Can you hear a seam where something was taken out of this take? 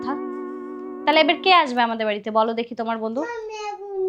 no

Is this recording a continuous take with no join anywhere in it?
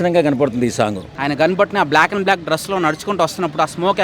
no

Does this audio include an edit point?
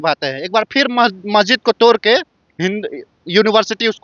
no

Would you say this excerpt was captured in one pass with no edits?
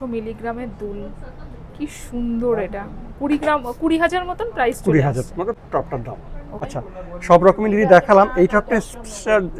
yes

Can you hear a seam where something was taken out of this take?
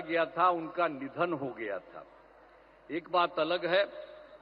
no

